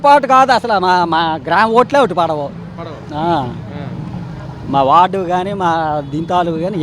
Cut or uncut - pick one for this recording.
uncut